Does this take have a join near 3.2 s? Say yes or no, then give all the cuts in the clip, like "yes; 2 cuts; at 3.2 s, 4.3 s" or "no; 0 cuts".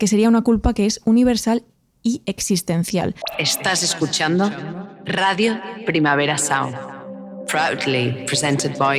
yes; 1 cut; at 3.2 s